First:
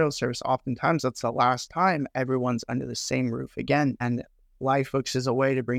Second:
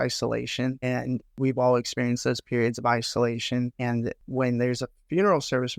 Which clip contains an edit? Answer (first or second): second